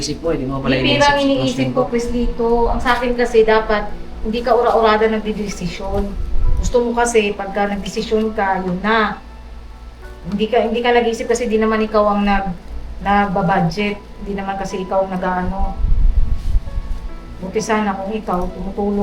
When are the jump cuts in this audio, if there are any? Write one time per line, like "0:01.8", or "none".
0:17.3